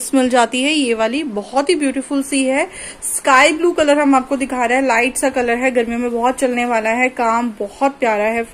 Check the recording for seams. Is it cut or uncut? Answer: uncut